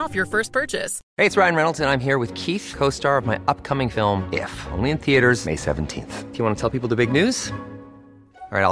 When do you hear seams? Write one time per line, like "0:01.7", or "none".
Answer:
0:01.0

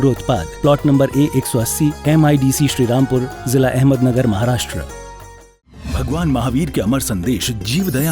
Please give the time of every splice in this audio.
0:05.8

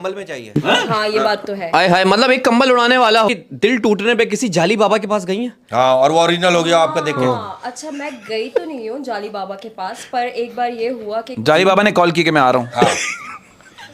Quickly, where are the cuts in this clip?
0:03.3

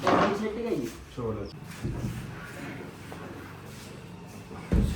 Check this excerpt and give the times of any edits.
none

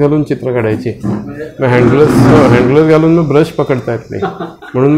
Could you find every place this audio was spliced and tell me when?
none

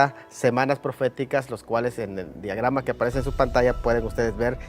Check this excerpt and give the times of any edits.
0:01.7

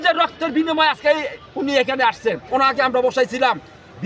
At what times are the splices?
0:02.4

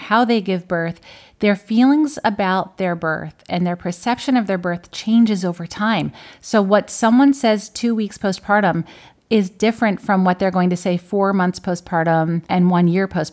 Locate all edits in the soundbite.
0:12.4

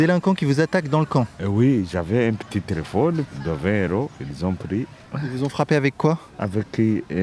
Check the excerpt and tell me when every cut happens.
0:01.4
0:03.4
0:05.0
0:06.3

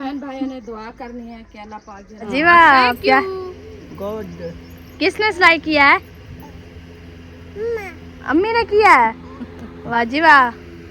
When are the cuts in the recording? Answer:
0:02.3
0:10.0

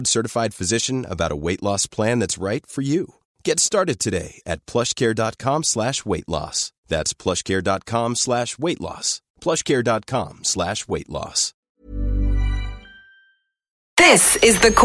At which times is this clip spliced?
0:13.8

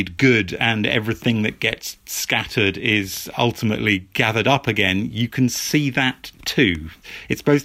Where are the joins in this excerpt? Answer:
none

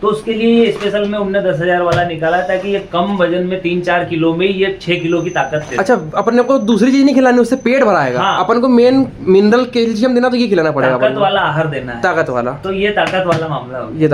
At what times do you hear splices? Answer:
none

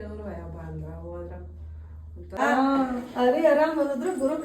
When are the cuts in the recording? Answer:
0:02.4

